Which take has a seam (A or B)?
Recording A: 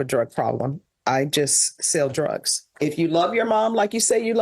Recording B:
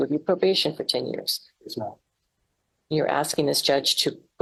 A